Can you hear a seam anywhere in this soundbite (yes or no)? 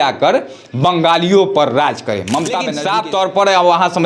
yes